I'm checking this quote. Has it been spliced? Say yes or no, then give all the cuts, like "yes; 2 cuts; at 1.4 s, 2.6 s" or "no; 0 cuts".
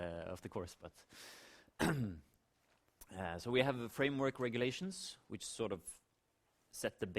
yes; 1 cut; at 4.0 s